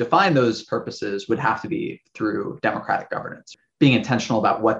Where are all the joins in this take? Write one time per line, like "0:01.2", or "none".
0:03.5